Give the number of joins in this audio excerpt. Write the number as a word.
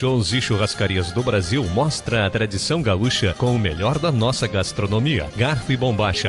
zero